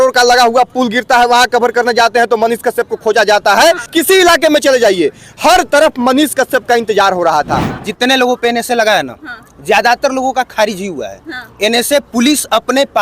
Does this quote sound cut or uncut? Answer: cut